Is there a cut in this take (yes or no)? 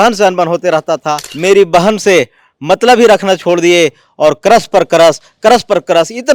yes